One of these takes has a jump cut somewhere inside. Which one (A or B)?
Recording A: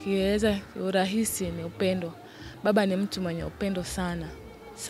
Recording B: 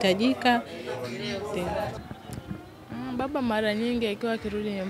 B